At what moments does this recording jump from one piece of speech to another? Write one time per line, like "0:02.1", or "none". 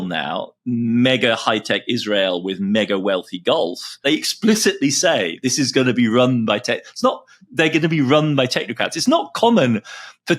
0:04.0